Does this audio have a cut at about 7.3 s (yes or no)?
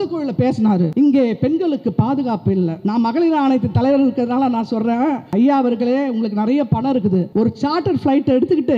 yes